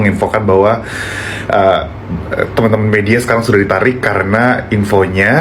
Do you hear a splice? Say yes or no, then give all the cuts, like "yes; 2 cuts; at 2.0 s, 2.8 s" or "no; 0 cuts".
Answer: no; 0 cuts